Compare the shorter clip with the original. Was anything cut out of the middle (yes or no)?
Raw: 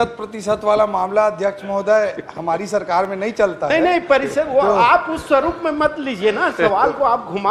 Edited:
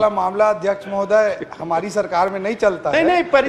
no